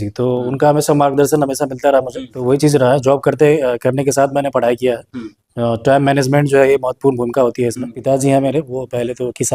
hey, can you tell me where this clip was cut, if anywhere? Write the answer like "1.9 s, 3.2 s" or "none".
2.3 s, 7.9 s